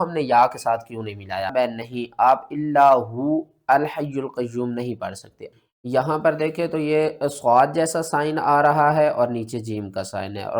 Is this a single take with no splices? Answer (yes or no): no